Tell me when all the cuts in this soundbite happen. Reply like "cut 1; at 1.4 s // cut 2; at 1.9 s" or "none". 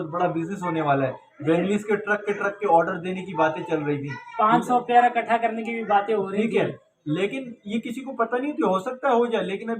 none